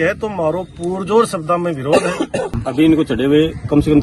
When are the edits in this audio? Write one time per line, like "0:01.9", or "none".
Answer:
0:02.6